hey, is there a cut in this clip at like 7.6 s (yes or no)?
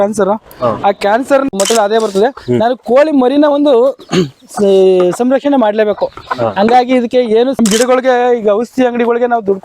yes